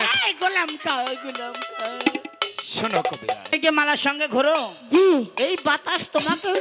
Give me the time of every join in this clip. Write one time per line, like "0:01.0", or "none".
0:03.4